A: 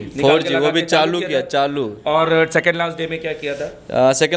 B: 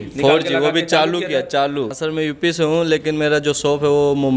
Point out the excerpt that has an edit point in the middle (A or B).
B